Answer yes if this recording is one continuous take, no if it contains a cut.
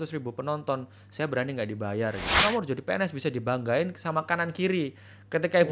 no